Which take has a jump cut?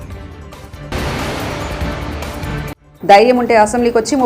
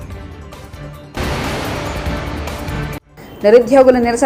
first; 2 cuts; at 0.9 s, 2.8 s

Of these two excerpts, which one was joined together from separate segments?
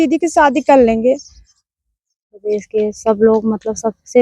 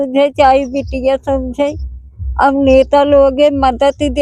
first; 1 cut; at 2.3 s

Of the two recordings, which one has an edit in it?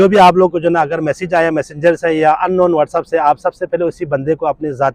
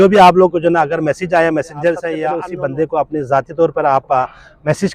second; 1 cut; at 2.2 s

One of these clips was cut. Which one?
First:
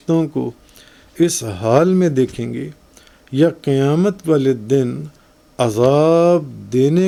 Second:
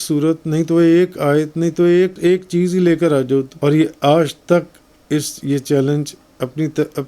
second; 2 cuts; at 2.1 s, 3.5 s

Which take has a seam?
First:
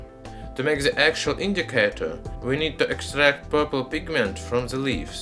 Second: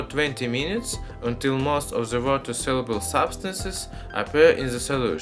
second; 1 cut; at 1.9 s

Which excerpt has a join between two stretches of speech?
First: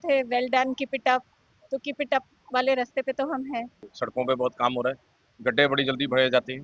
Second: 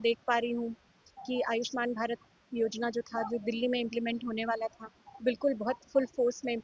first; 1 cut; at 3.8 s

